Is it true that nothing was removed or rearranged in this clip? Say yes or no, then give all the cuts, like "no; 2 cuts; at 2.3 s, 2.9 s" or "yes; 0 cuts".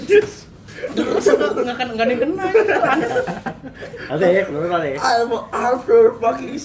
yes; 0 cuts